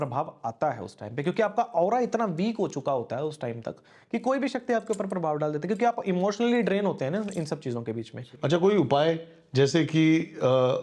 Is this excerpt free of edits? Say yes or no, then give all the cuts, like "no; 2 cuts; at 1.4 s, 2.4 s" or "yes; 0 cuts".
no; 1 cut; at 8.2 s